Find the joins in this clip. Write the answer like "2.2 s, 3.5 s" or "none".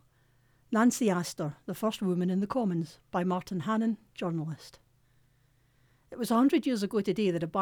none